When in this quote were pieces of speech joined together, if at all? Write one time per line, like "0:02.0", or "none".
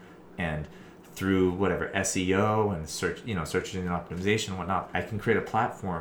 0:04.9